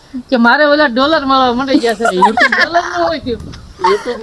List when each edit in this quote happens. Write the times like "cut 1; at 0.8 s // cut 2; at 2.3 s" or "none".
none